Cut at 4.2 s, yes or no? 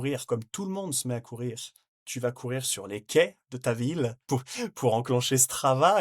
yes